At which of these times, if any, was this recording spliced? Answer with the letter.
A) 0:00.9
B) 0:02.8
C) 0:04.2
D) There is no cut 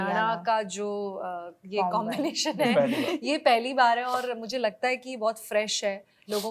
D